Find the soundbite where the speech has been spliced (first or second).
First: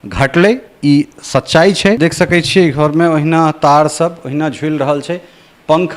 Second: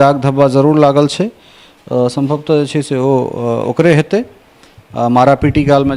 first